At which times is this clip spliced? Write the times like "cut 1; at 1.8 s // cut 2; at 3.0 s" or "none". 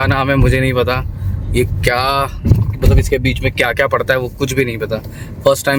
none